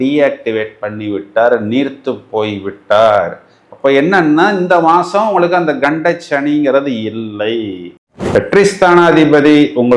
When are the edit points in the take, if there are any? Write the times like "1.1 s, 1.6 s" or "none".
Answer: 8.3 s